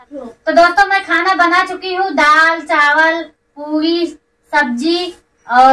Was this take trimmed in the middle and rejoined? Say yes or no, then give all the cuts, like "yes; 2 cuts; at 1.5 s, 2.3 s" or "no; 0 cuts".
no; 0 cuts